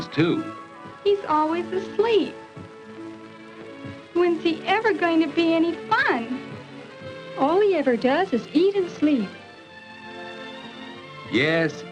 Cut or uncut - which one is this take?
uncut